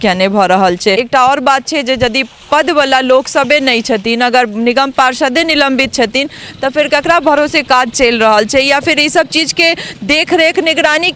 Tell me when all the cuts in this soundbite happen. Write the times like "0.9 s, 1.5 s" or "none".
1.0 s